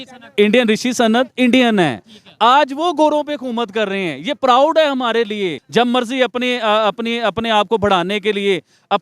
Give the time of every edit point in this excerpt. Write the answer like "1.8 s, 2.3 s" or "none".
5.6 s